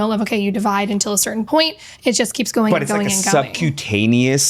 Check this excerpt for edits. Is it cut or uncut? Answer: uncut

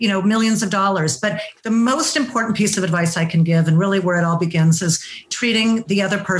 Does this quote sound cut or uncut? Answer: cut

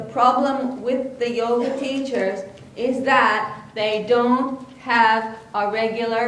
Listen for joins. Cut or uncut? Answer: uncut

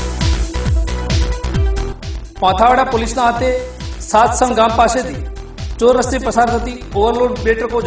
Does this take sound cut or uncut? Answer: uncut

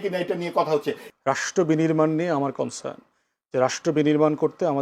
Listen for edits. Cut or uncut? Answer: cut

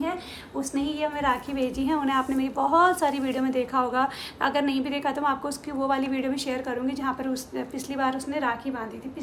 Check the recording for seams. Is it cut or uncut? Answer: uncut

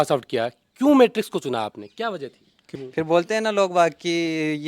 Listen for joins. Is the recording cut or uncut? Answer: cut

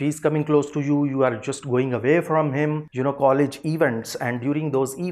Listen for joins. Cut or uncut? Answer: cut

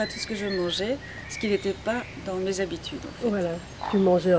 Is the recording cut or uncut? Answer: uncut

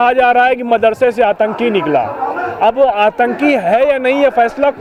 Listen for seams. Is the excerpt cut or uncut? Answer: uncut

